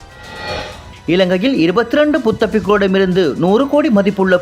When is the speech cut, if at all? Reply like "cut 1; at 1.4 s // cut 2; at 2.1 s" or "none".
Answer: cut 1; at 0.9 s